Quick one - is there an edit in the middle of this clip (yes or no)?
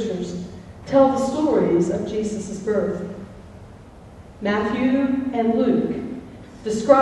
no